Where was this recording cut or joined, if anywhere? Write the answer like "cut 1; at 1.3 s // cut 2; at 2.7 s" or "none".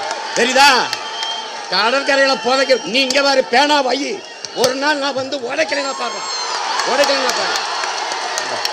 none

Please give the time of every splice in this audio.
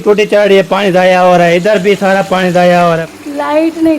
cut 1; at 3.1 s

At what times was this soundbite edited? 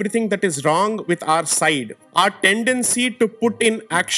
none

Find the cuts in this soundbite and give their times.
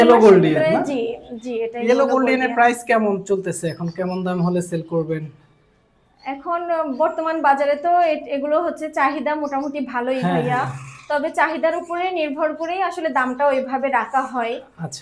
none

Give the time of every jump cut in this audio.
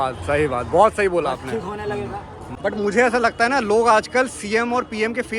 cut 1; at 2.4 s

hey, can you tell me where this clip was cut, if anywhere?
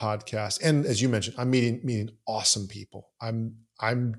none

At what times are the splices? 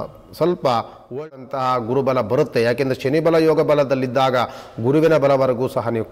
cut 1; at 1.2 s

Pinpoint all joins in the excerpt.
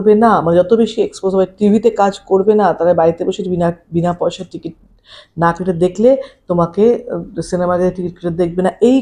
none

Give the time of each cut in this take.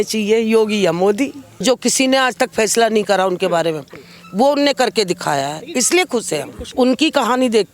cut 1; at 1.5 s // cut 2; at 6.7 s

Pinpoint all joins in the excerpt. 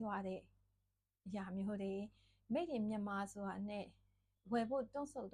none

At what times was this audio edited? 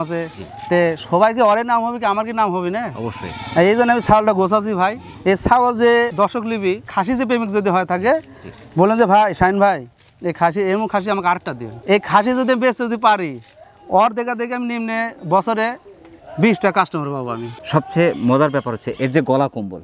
none

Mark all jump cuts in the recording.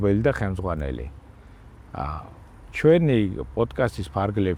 none

